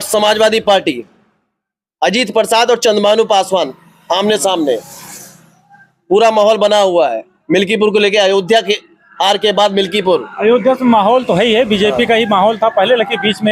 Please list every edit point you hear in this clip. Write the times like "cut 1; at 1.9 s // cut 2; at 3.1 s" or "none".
none